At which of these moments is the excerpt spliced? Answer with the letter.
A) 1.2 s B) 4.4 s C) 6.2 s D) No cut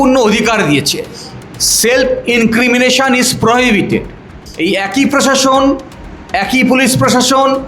B